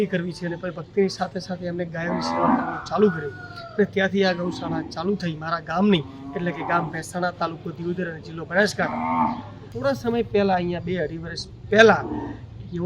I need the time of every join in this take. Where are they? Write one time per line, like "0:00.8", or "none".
0:09.7